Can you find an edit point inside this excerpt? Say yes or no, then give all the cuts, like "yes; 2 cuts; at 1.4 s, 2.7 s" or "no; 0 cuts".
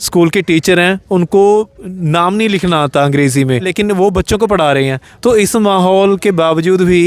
yes; 1 cut; at 3.7 s